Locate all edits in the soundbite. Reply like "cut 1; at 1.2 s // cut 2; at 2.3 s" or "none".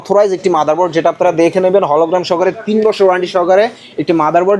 none

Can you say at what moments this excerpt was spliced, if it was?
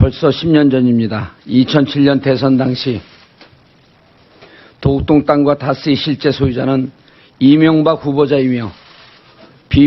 none

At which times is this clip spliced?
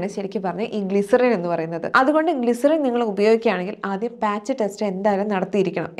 cut 1; at 1.8 s

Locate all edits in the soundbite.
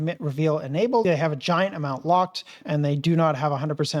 cut 1; at 1.0 s // cut 2; at 2.6 s

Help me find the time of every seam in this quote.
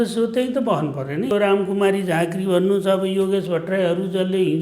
cut 1; at 1.3 s

